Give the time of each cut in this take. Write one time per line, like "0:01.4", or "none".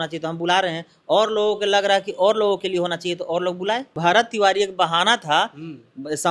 0:03.9